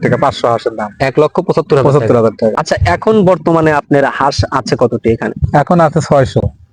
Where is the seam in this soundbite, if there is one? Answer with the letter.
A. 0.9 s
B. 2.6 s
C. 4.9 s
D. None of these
B